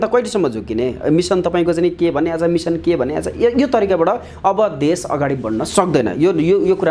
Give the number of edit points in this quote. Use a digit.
0